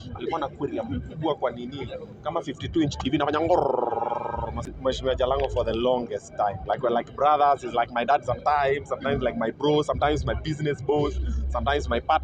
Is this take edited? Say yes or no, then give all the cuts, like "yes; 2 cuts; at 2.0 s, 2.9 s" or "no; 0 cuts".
yes; 1 cut; at 4.7 s